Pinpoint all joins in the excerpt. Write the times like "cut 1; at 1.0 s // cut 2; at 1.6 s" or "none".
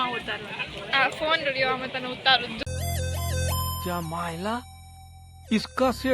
cut 1; at 2.6 s